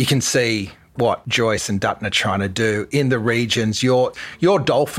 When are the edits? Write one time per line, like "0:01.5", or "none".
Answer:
0:01.0